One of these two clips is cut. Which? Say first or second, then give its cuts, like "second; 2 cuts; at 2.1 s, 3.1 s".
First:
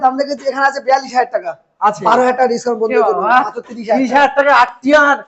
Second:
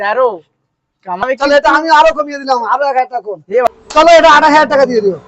second; 2 cuts; at 1.2 s, 3.7 s